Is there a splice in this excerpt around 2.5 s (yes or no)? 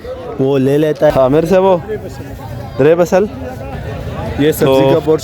no